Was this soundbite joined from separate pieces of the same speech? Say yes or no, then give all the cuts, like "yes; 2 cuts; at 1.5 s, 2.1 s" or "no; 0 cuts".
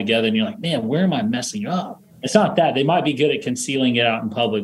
yes; 1 cut; at 2.0 s